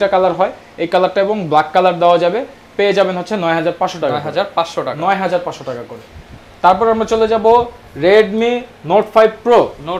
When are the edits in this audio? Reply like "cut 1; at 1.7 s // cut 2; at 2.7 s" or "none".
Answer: none